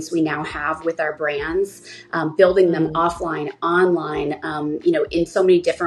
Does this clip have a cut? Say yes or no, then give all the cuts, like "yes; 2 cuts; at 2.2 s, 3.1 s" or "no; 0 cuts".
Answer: no; 0 cuts